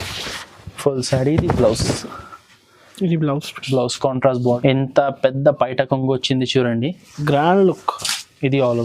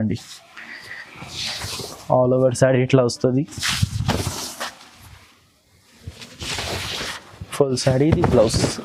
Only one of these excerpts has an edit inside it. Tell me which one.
first; 1 cut; at 4.6 s

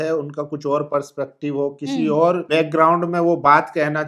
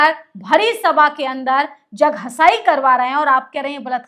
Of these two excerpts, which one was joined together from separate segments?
first; 1 cut; at 2.4 s

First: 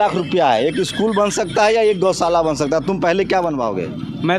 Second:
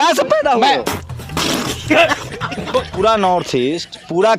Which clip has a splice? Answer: second; 2 cuts; at 0.8 s, 2.9 s

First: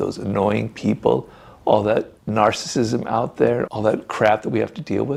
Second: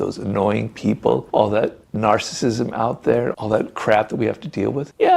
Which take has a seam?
second; 1 cut; at 1.2 s

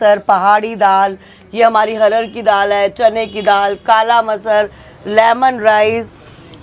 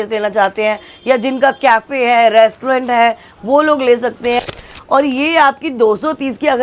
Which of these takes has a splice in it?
second; 1 cut; at 4.4 s

